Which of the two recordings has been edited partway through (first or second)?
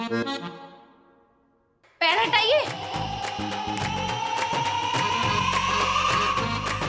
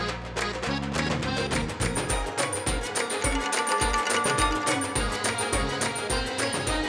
second